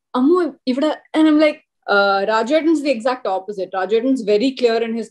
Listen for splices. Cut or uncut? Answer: cut